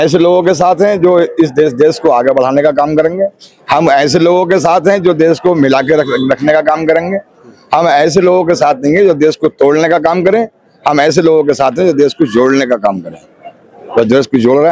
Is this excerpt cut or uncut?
uncut